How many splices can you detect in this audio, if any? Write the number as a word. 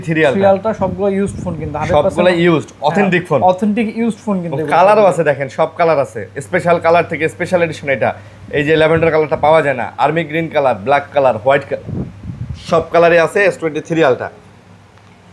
zero